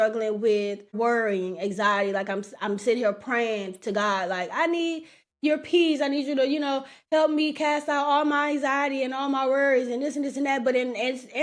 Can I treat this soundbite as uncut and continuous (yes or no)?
no